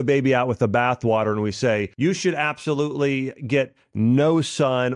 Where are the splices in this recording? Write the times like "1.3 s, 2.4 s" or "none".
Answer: 1.9 s

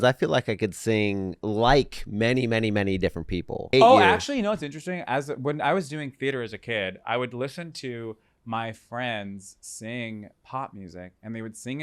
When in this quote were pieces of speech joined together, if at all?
1.4 s, 3.7 s

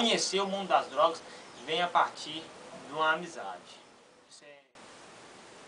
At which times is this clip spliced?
4.4 s

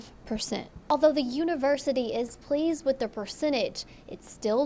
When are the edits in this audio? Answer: none

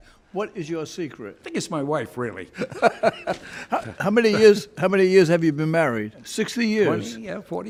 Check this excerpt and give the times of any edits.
none

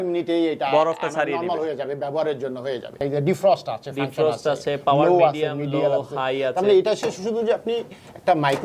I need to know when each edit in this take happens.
3.0 s

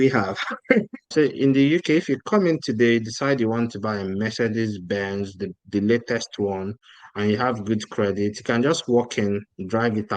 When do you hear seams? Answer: 1.0 s

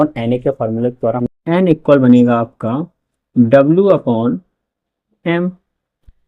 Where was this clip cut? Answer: 1.2 s

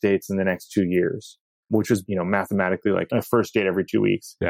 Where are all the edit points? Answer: 1.8 s, 3.1 s

